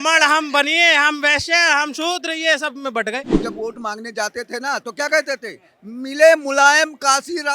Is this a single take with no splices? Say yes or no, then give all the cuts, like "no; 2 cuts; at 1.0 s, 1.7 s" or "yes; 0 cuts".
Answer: no; 1 cut; at 3.3 s